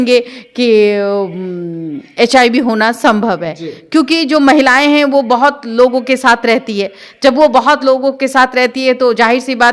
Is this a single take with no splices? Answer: yes; 0 cuts

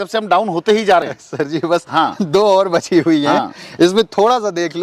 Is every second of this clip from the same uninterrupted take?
yes; 0 cuts

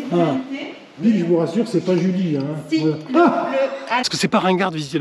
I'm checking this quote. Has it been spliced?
yes; 2 cuts; at 1.0 s, 4.0 s

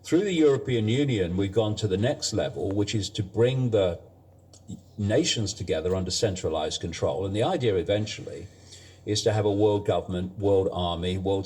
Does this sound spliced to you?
yes; 1 cut; at 2.0 s

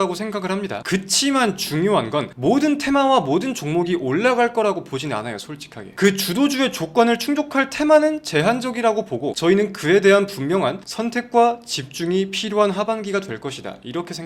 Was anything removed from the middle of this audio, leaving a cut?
no; 0 cuts

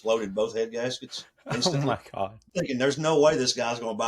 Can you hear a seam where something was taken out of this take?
yes; 1 cut; at 2.5 s

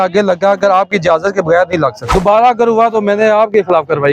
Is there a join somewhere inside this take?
yes; 1 cut; at 2.0 s

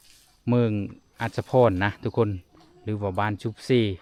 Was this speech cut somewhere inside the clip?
no; 0 cuts

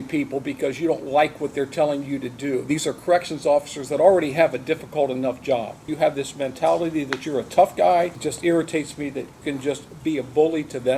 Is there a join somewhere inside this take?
yes; 3 cuts; at 5.9 s, 8.2 s, 9.3 s

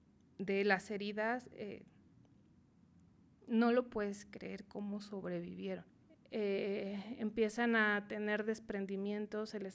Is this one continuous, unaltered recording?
no; 1 cut; at 6.0 s

